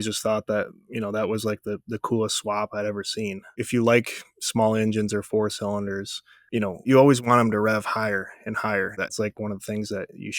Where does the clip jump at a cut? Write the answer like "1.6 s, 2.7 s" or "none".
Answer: 3.4 s, 6.9 s, 9.2 s